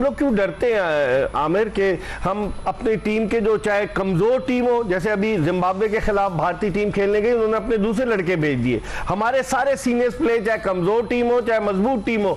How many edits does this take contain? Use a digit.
0